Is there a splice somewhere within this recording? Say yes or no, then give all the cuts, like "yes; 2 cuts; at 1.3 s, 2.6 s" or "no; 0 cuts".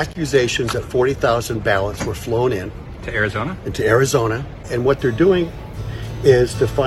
yes; 1 cut; at 4.6 s